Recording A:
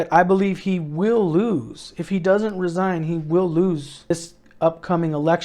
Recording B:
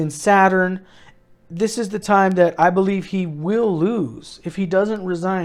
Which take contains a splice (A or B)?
A